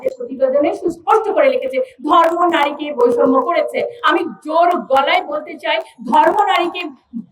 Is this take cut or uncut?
uncut